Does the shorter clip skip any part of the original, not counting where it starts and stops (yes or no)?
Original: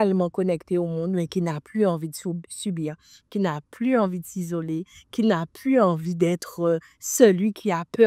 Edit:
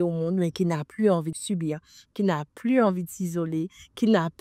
yes